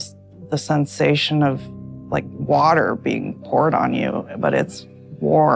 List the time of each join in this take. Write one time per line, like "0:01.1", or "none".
none